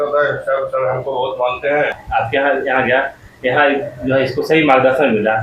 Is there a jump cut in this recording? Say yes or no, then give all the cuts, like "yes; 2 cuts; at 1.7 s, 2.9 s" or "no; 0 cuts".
yes; 1 cut; at 1.9 s